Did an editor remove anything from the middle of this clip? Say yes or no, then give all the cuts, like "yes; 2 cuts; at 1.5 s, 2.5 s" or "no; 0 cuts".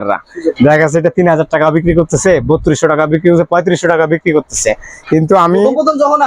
no; 0 cuts